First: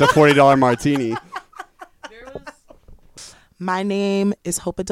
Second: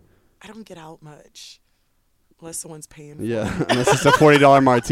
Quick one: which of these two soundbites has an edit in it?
first; 1 cut; at 3.2 s

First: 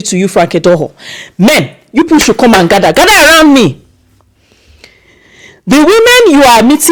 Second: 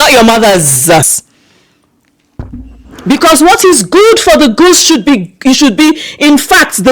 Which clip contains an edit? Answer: second; 1 cut; at 1.0 s

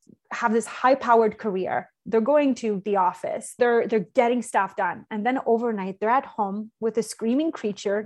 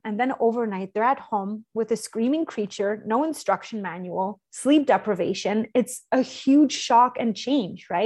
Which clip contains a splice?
first; 1 cut; at 3.6 s

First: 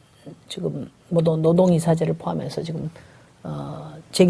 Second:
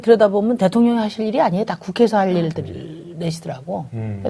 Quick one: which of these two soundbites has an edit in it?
second; 1 cut; at 3.4 s

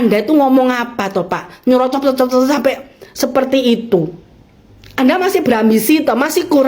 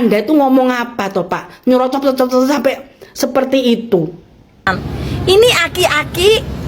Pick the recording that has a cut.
second; 1 cut; at 4.8 s

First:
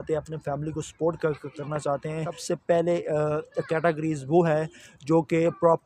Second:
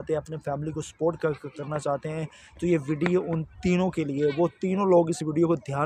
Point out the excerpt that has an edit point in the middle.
first; 1 cut; at 2.4 s

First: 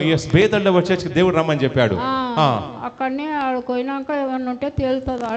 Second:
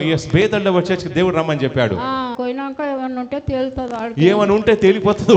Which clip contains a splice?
second; 1 cut; at 2.3 s

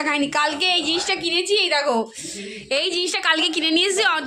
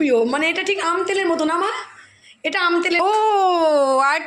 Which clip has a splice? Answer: second; 1 cut; at 3.0 s

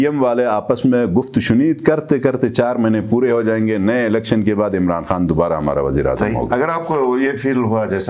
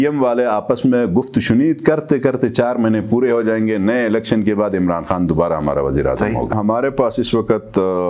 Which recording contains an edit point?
second; 1 cut; at 6.5 s

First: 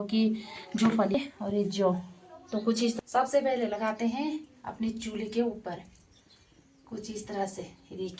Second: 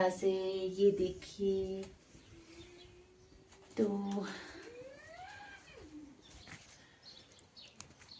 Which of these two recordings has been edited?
first; 2 cuts; at 1.1 s, 3.0 s

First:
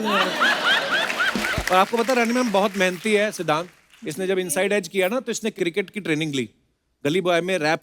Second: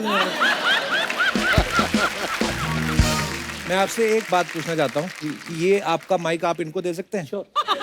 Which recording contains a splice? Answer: first; 1 cut; at 1.4 s

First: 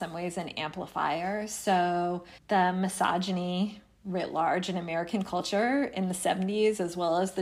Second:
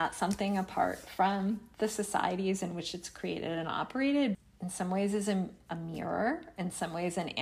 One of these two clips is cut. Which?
second; 1 cut; at 4.4 s

